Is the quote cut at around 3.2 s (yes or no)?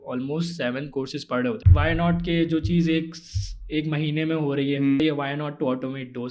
no